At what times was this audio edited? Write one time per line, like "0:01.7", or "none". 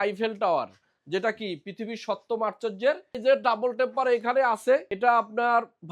0:03.2
0:04.9